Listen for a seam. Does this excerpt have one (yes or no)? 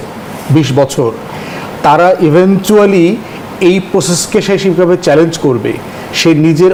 no